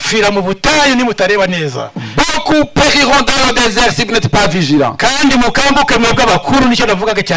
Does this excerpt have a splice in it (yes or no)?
no